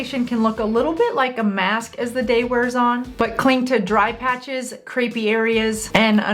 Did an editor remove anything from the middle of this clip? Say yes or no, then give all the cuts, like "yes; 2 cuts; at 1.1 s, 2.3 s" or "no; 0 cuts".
yes; 1 cut; at 3.1 s